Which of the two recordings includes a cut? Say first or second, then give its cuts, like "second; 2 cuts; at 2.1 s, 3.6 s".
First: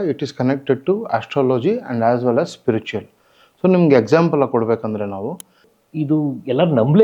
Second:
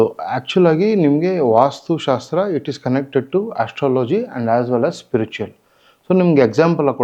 first; 1 cut; at 5.7 s